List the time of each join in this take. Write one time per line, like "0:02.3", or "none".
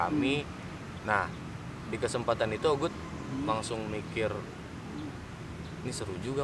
none